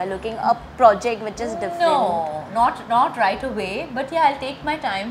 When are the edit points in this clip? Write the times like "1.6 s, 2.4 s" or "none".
none